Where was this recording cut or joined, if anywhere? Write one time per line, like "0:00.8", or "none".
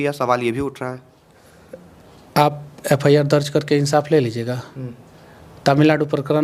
none